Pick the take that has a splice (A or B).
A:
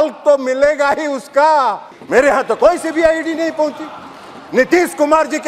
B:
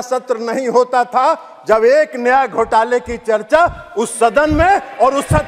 A